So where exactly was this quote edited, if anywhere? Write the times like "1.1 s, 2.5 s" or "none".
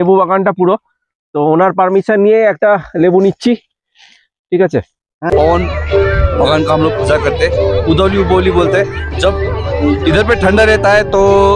5.3 s